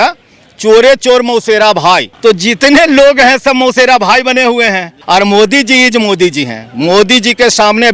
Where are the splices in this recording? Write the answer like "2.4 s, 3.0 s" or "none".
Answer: 2.1 s, 4.9 s